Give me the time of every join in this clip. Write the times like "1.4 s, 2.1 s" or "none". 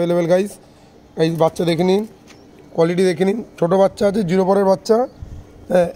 none